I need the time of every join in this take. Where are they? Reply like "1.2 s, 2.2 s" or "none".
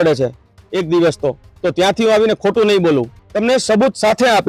3.2 s